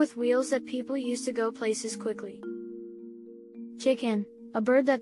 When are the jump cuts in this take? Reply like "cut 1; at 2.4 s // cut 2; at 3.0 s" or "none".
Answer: cut 1; at 2.3 s // cut 2; at 3.8 s